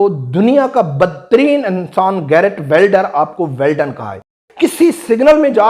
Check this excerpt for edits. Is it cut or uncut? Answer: cut